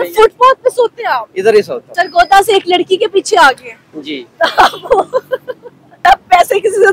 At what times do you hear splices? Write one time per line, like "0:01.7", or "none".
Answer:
0:01.8
0:06.0